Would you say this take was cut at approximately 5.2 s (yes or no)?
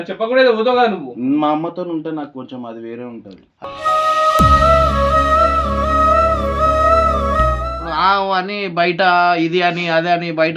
no